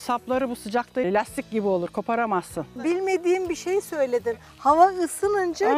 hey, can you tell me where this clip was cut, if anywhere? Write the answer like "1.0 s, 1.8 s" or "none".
1.0 s, 2.9 s